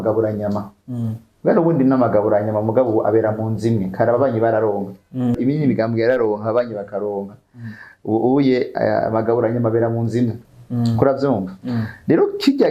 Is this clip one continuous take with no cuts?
no; 2 cuts; at 5.4 s, 10.5 s

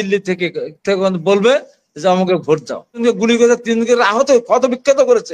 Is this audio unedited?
no; 1 cut; at 3.0 s

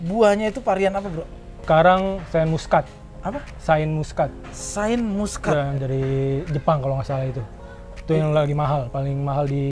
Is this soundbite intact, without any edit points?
no; 2 cuts; at 1.6 s, 5.8 s

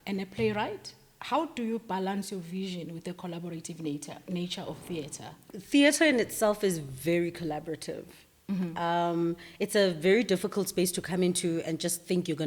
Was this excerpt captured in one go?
no; 1 cut; at 5.4 s

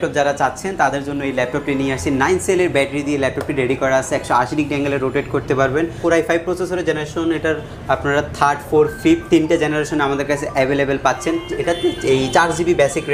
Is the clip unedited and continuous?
yes; 0 cuts

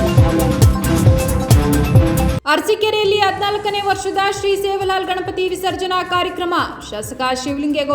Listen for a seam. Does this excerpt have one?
yes; 1 cut; at 2.4 s

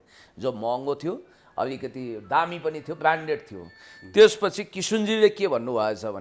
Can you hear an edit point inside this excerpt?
no; 0 cuts

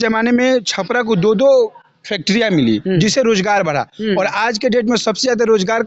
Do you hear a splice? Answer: no; 0 cuts

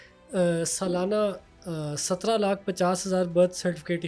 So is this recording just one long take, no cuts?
yes; 0 cuts

